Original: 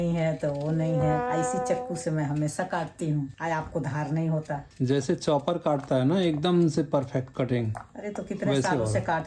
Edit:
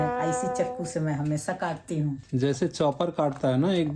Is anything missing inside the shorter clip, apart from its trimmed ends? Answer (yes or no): yes